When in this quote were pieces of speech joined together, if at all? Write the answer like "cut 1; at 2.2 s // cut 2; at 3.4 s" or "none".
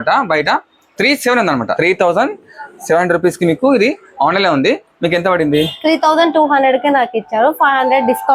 cut 1; at 1.8 s